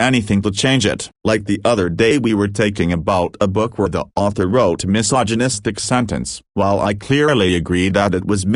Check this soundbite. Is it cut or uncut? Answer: cut